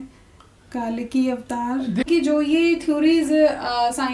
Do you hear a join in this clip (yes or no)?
yes